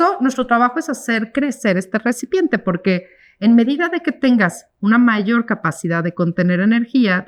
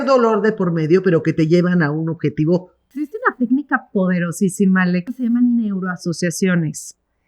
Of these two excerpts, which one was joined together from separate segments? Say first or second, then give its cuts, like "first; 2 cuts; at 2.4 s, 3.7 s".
second; 2 cuts; at 3.0 s, 5.0 s